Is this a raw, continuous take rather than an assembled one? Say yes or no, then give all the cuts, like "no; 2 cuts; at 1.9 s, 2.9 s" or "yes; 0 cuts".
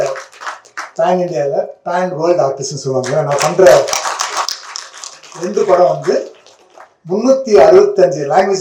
yes; 0 cuts